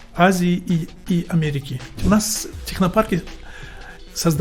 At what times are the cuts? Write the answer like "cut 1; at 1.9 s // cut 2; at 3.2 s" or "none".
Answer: cut 1; at 2.0 s

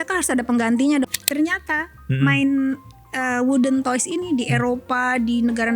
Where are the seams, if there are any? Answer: cut 1; at 1.1 s

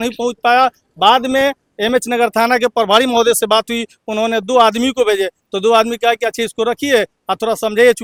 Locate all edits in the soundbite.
none

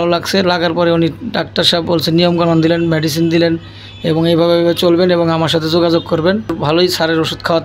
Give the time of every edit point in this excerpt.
cut 1; at 6.6 s

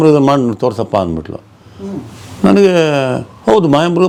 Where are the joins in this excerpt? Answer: none

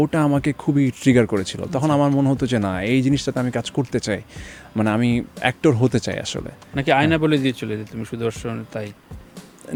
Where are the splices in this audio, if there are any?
none

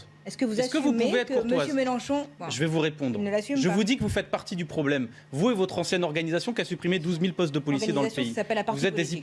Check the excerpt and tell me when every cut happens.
none

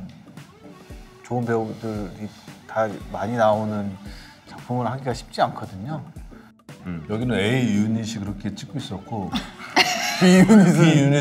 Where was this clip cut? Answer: cut 1; at 6.8 s

